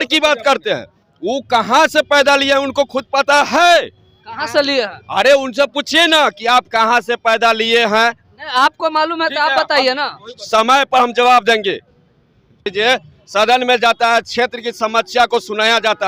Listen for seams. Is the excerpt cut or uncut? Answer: uncut